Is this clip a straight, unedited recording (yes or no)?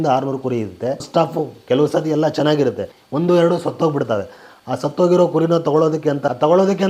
yes